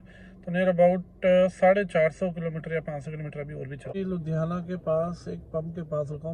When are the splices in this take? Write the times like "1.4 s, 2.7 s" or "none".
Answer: 3.9 s